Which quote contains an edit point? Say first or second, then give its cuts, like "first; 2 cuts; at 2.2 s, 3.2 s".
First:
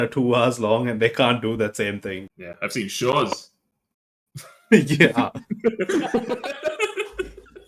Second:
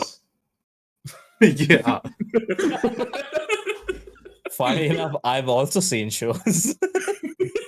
first; 1 cut; at 2.2 s